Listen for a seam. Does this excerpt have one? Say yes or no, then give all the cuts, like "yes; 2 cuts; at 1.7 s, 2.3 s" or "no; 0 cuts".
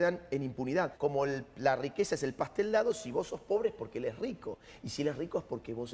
yes; 1 cut; at 0.9 s